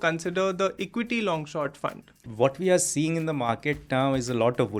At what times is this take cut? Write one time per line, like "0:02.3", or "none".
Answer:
0:02.3